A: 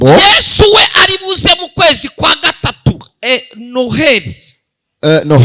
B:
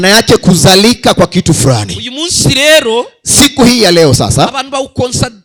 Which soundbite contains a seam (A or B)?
A